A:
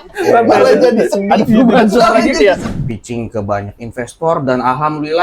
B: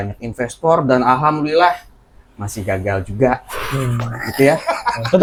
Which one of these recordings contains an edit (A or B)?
A